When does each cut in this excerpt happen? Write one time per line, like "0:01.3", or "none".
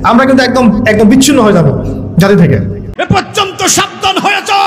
0:02.9